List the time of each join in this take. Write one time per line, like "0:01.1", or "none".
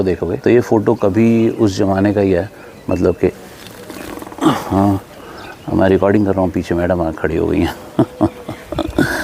none